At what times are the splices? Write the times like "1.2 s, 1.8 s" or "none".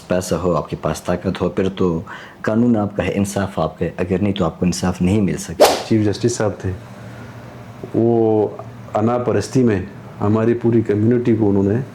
5.8 s